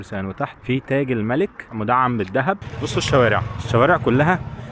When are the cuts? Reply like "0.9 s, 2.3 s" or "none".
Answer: 2.6 s